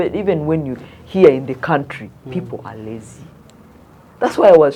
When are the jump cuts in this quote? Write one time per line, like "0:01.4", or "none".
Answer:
none

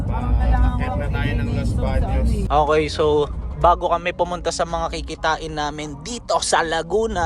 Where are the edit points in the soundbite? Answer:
none

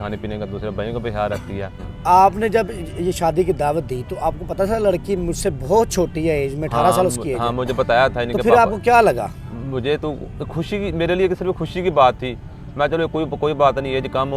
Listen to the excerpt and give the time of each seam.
0:01.9

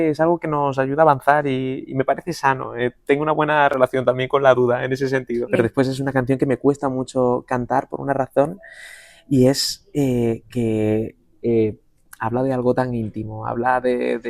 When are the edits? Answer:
0:05.5

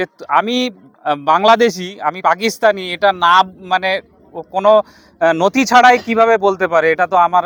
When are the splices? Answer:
none

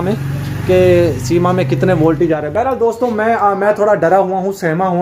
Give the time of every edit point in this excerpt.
none

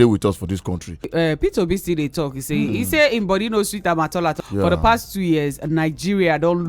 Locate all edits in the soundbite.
0:01.1
0:04.4

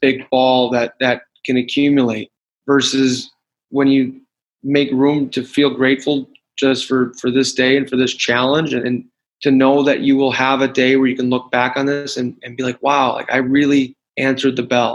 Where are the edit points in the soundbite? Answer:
0:14.0

